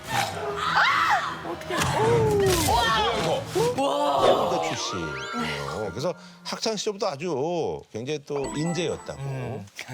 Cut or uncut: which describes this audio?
cut